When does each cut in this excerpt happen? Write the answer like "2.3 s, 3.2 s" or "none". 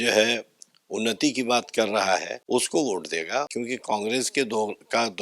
2.3 s, 3.5 s